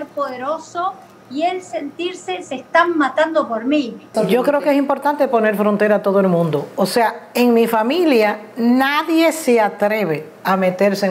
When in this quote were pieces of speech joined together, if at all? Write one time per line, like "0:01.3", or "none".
0:04.1